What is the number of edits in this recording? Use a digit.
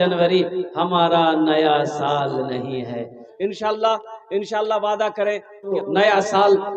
2